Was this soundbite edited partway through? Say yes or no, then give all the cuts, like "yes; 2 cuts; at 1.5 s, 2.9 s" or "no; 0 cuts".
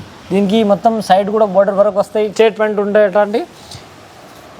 yes; 1 cut; at 2.3 s